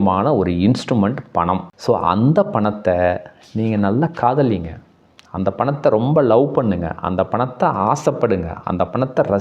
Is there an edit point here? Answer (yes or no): yes